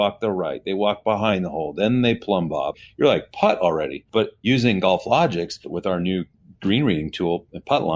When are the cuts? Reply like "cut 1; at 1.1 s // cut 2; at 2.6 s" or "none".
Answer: cut 1; at 2.7 s // cut 2; at 4.4 s // cut 3; at 5.7 s